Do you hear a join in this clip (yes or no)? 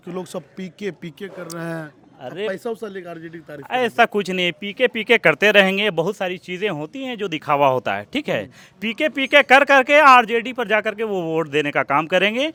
no